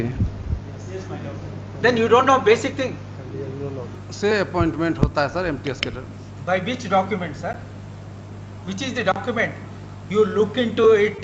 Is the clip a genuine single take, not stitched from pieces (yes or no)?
no